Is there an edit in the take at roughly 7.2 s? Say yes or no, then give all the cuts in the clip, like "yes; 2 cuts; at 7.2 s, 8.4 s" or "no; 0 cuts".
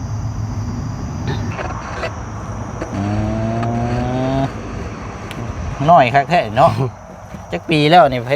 no; 1 cut; at 1.5 s